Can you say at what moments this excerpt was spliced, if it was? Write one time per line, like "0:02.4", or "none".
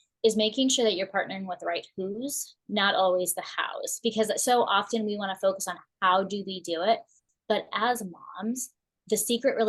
none